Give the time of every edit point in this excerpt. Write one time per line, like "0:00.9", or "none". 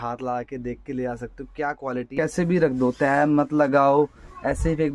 0:02.1